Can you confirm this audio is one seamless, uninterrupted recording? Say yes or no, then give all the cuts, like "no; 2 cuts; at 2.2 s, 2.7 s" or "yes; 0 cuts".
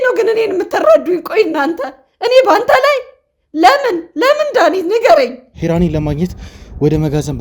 no; 1 cut; at 5.5 s